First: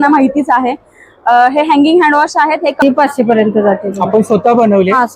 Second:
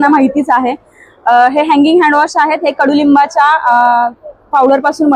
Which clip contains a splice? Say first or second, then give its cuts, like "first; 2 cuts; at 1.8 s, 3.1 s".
first; 1 cut; at 2.8 s